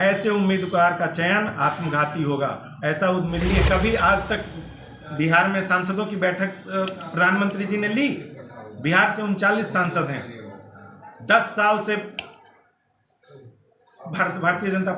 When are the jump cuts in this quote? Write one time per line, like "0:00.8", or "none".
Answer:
0:03.4